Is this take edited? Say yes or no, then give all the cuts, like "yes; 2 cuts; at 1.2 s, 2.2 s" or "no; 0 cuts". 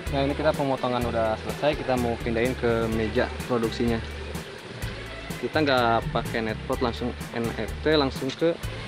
no; 0 cuts